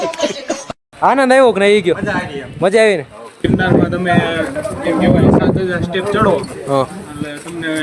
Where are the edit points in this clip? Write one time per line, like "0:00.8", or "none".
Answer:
0:03.4